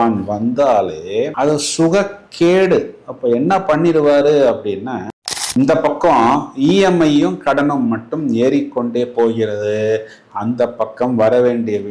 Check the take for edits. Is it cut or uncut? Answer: cut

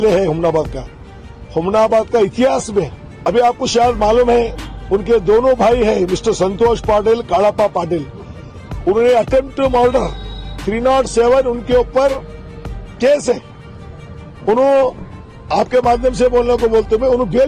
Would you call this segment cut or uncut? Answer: cut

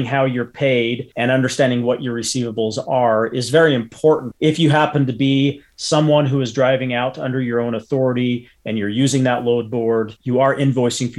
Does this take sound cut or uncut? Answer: cut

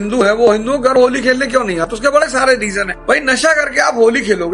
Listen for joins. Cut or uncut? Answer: uncut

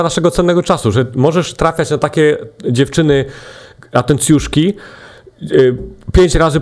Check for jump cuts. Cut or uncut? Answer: uncut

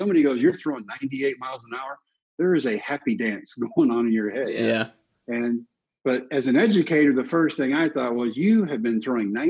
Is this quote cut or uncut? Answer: uncut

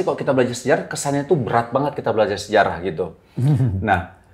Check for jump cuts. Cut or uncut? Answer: uncut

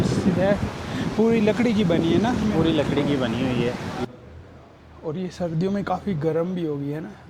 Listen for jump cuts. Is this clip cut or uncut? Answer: cut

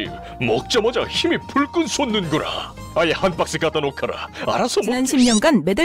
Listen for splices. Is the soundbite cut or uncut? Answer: cut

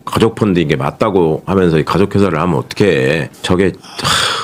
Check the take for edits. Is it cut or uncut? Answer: cut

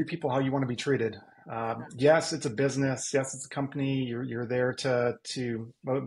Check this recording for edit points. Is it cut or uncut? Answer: uncut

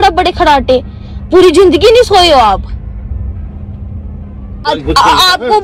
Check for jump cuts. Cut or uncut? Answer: uncut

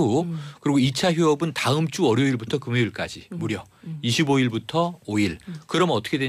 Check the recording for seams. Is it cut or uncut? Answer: uncut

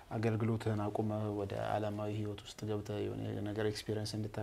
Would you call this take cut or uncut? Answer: uncut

